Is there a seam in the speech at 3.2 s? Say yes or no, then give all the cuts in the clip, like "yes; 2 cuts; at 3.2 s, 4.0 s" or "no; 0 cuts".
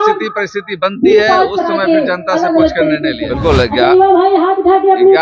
yes; 1 cut; at 3.2 s